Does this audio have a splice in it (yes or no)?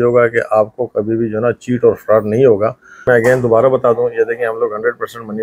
yes